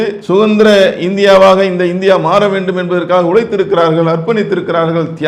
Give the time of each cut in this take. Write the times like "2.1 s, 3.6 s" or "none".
none